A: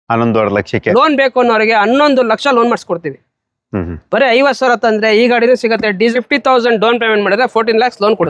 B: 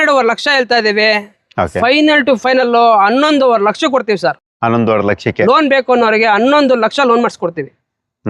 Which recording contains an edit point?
A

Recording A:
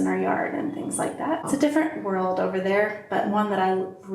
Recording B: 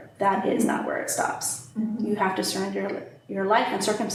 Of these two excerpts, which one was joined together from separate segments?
A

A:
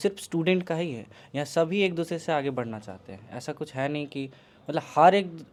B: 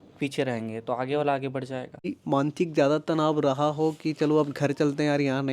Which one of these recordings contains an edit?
B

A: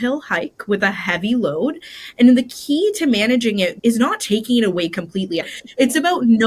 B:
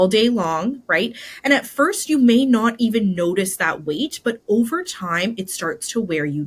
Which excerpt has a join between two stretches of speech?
A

